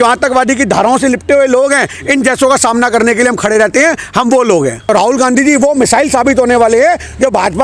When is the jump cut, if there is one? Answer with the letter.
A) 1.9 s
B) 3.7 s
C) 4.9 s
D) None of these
C